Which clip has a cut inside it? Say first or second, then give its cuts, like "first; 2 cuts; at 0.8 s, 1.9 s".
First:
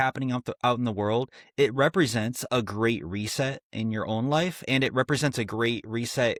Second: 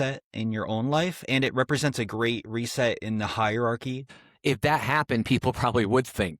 second; 1 cut; at 4.0 s